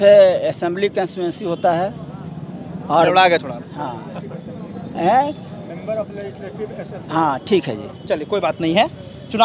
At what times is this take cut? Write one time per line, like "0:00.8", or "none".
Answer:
none